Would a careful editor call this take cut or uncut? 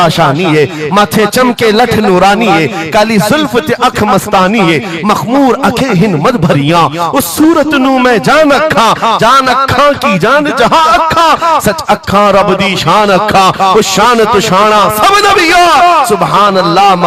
uncut